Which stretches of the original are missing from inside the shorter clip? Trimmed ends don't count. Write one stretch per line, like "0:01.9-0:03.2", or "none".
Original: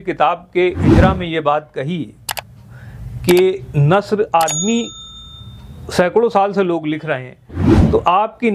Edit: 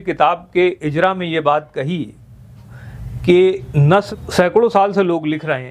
0:04.1-0:05.7